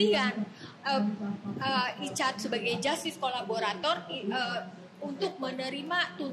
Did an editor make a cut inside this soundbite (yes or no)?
no